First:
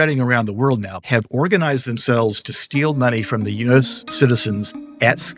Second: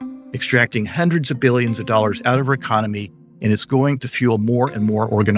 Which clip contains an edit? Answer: first; 2 cuts; at 1.0 s, 4.0 s

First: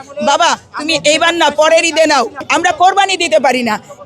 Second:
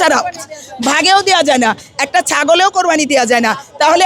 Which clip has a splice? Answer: first; 1 cut; at 2.4 s

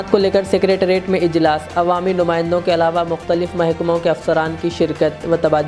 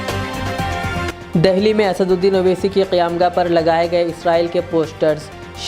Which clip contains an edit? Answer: second; 1 cut; at 1.1 s

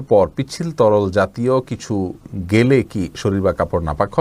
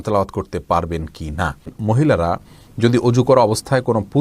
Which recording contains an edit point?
second; 1 cut; at 1.7 s

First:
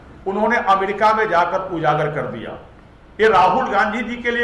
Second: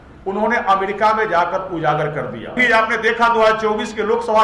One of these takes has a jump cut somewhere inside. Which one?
second; 1 cut; at 2.6 s

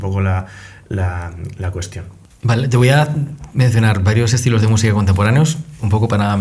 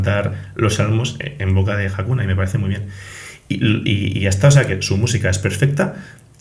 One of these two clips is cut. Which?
first; 1 cut; at 2.2 s

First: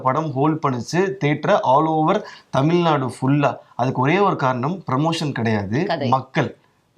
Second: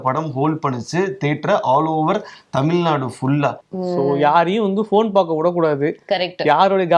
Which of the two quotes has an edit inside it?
second; 1 cut; at 3.6 s

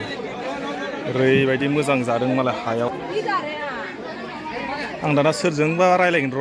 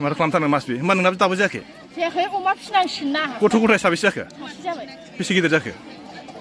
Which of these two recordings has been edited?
first; 1 cut; at 2.9 s

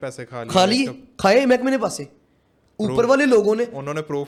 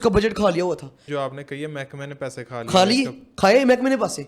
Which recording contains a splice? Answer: second; 1 cut; at 0.9 s

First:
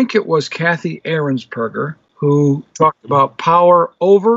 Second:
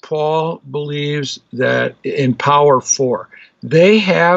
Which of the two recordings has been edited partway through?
first; 1 cut; at 2.0 s

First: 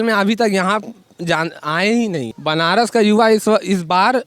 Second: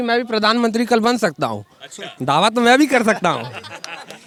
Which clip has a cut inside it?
first; 1 cut; at 2.3 s

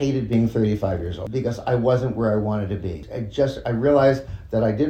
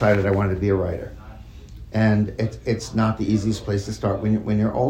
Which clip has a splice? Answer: first; 2 cuts; at 1.2 s, 3.1 s

